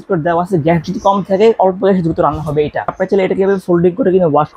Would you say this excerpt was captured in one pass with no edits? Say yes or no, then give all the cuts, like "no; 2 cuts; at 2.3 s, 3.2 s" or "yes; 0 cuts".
no; 1 cut; at 3.0 s